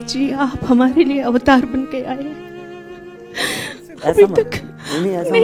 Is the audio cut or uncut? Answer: uncut